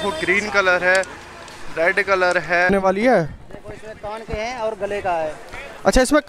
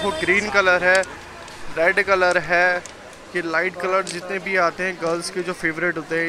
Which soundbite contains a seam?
first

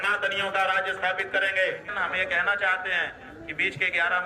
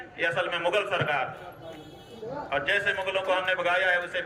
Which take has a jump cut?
first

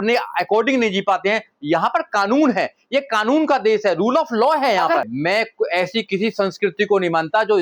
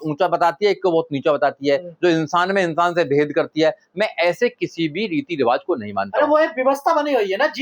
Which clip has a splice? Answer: first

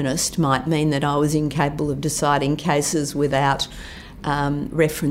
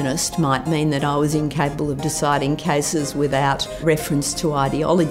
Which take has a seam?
second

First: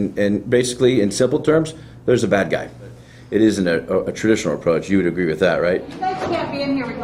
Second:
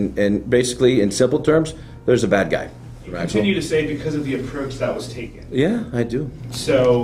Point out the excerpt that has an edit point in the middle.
first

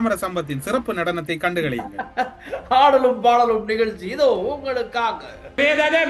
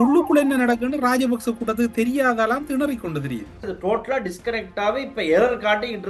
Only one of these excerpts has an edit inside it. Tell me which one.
second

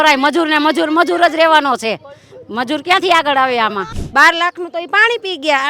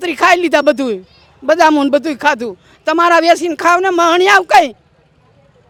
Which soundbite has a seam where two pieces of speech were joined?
first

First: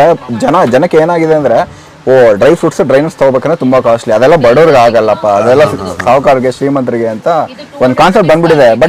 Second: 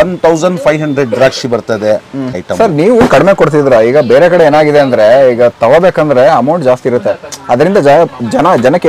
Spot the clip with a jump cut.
second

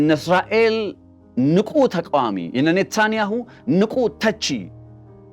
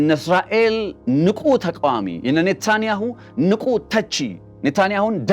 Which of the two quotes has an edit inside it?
second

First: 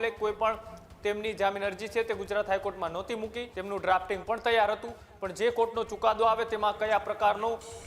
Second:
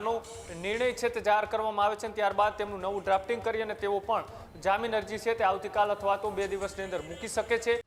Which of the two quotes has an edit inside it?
first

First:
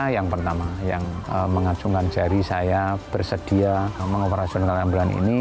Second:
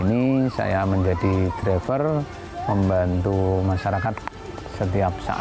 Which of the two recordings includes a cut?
first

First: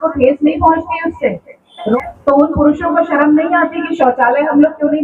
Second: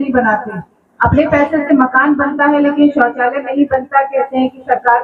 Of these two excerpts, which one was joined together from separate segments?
first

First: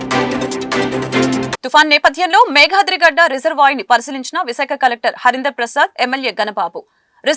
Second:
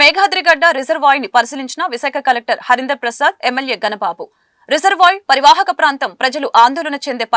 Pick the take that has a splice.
first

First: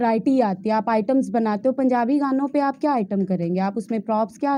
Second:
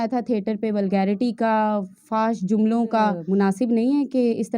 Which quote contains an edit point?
second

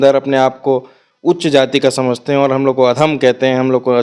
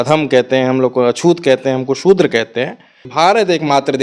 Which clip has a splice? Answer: second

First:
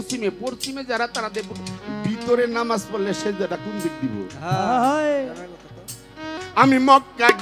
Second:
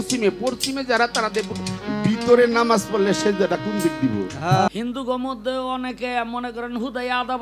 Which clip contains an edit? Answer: second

